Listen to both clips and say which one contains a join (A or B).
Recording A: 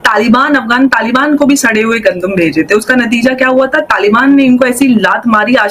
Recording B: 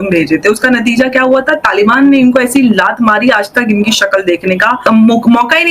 B